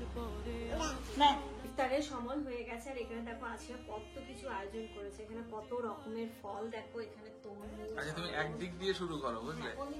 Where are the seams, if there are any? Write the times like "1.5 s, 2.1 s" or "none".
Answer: none

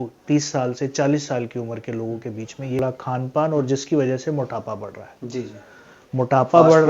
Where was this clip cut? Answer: 2.8 s

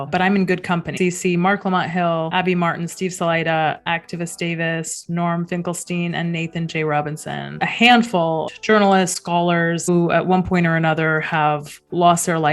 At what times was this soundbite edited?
0.9 s, 7.6 s, 8.5 s, 9.9 s

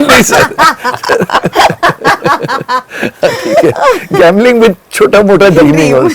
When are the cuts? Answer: none

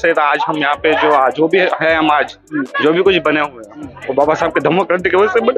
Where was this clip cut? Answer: none

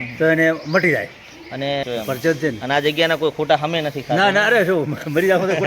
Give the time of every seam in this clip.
1.8 s

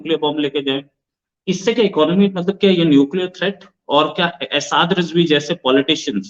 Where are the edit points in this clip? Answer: 1.2 s

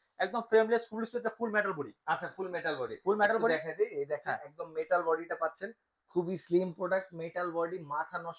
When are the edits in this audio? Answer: none

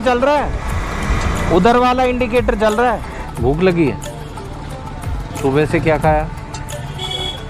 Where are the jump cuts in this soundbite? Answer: 3.1 s

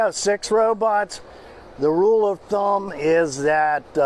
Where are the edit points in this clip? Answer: none

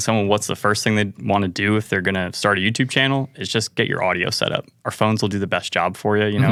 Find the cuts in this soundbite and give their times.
none

